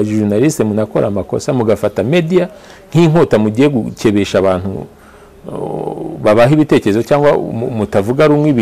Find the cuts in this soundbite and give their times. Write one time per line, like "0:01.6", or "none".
none